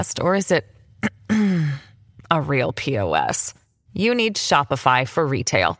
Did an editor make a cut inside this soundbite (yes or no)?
no